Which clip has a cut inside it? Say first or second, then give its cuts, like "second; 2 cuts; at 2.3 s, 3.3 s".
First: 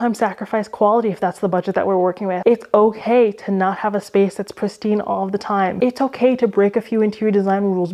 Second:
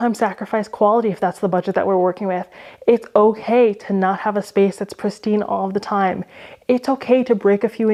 first; 2 cuts; at 2.4 s, 5.7 s